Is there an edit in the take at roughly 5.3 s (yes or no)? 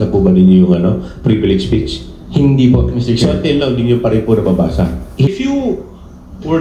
yes